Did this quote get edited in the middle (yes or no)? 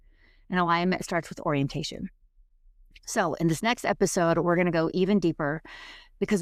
no